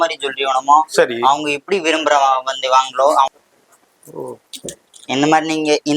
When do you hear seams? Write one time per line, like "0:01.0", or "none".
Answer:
0:03.3

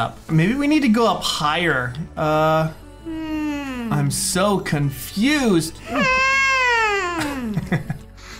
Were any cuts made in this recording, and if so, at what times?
none

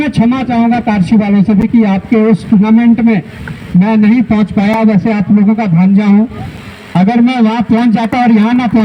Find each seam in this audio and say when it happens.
none

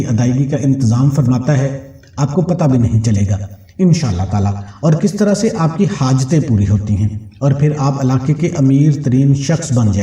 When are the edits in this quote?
none

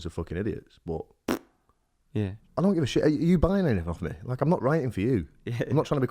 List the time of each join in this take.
0:02.4

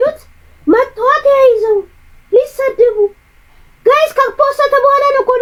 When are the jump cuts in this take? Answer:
none

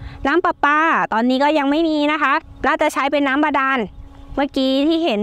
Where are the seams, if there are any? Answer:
0:02.5

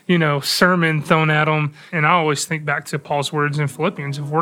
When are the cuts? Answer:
0:01.9

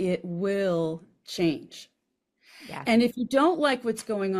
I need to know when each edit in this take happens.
none

